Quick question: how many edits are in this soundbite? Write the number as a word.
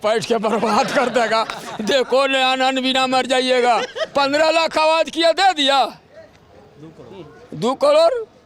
zero